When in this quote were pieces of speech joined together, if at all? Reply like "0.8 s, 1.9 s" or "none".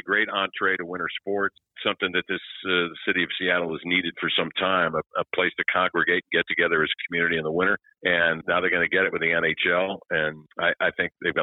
1.8 s, 7.9 s